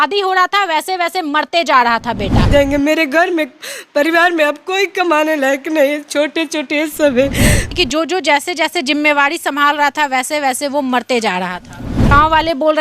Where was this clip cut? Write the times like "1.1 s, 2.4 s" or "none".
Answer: 2.5 s, 7.7 s, 12.1 s

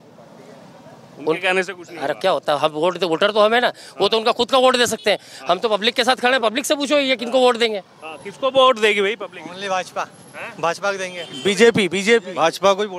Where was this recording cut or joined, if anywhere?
none

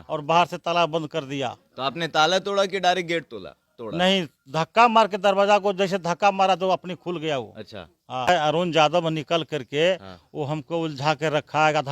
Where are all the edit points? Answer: 8.3 s

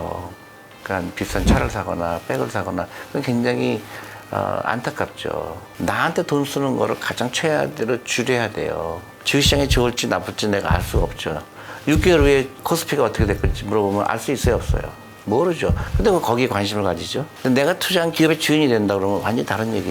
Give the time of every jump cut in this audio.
5.6 s, 9.1 s, 12.6 s, 17.2 s, 18.1 s

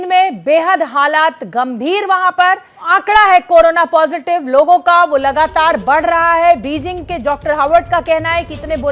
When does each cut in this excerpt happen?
2.8 s

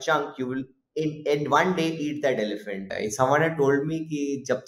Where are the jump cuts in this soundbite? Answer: 2.9 s

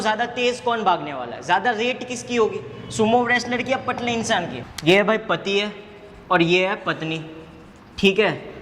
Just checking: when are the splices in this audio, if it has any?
4.6 s

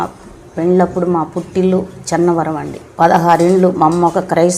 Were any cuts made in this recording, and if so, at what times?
2.8 s

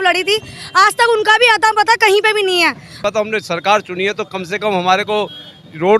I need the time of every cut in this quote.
3.0 s

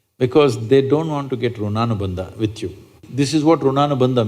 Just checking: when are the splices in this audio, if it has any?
3.0 s

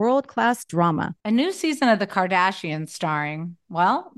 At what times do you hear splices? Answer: none

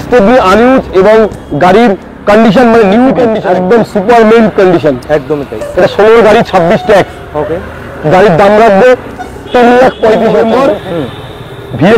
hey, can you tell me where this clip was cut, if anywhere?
3.4 s, 10.3 s

